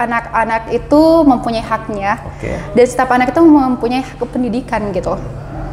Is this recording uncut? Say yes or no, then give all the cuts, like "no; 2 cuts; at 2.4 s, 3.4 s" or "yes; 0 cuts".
yes; 0 cuts